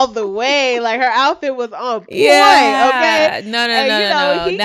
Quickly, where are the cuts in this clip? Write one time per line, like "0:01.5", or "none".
none